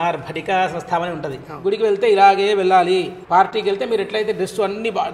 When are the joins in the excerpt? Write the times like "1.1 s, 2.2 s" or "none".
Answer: 1.4 s, 3.2 s